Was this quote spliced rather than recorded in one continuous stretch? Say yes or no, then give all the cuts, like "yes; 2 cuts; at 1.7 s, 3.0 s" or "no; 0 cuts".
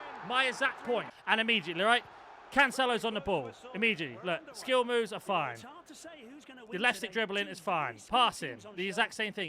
yes; 1 cut; at 1.1 s